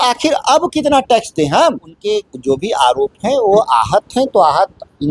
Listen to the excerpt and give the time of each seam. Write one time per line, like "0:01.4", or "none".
0:01.9